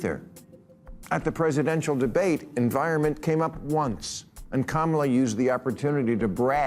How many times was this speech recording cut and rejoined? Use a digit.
0